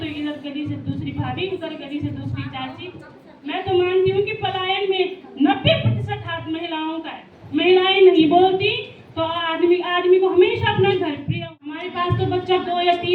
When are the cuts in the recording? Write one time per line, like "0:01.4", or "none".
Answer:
0:11.3